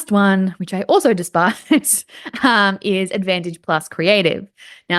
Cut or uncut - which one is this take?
uncut